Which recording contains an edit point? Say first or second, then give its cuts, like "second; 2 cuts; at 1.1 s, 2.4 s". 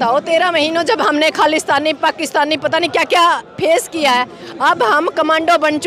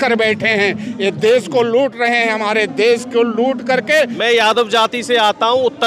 second; 1 cut; at 4.2 s